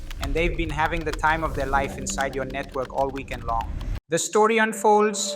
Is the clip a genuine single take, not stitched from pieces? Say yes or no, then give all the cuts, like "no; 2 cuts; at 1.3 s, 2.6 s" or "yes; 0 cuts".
no; 1 cut; at 3.9 s